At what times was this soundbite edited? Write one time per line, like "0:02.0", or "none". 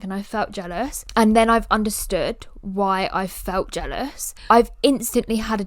0:04.3